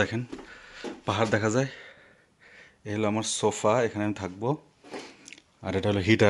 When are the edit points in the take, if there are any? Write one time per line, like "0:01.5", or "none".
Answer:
none